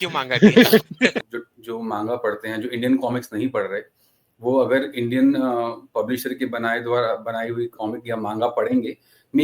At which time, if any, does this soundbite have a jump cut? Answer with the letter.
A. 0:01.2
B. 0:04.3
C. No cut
A